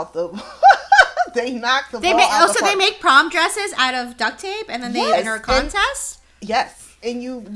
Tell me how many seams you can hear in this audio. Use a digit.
0